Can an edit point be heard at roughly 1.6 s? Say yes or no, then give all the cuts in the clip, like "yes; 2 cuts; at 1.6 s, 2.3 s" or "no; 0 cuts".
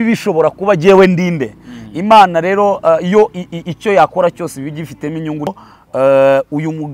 no; 1 cut; at 5.5 s